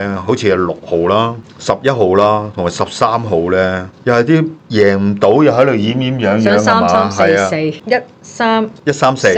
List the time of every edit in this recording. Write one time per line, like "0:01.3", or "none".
0:07.8